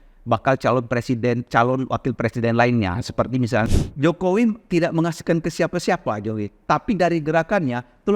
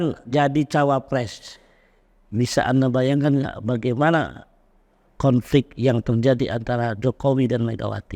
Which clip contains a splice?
first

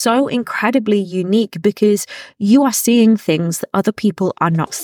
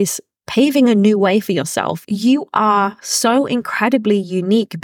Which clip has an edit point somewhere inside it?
second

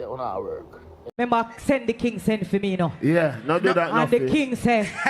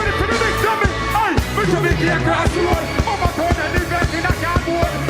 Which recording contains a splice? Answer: first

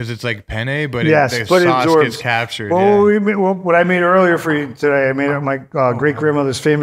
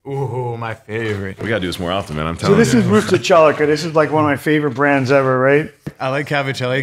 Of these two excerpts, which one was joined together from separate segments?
second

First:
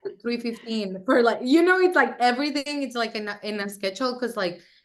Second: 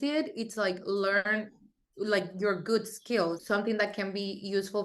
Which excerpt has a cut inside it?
second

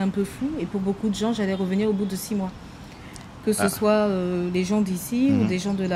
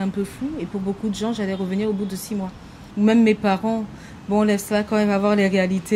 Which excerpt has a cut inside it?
second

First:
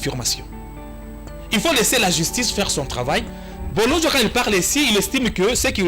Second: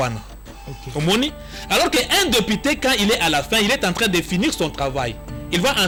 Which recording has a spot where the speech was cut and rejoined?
first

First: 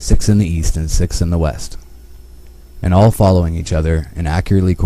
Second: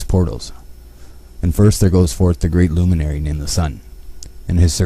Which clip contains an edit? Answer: first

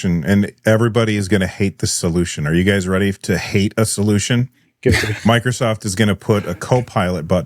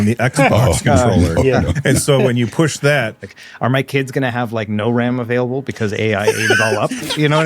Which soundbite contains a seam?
second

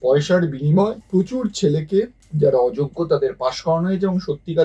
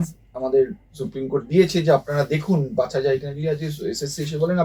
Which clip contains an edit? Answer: first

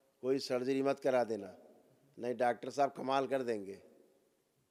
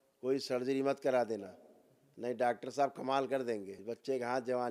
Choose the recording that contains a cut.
second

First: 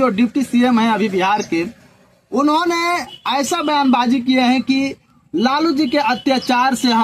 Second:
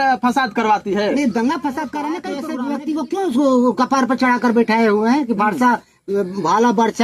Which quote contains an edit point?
second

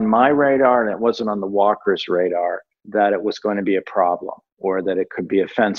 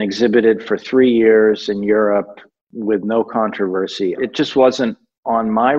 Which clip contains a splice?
second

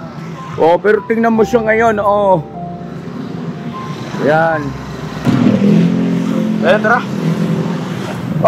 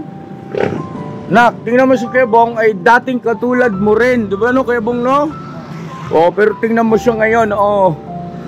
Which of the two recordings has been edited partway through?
first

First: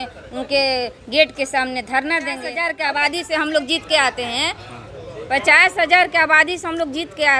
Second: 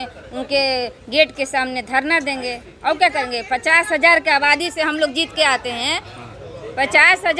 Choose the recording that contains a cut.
first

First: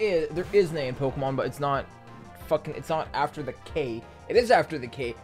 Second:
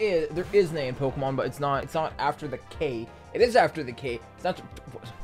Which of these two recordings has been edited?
second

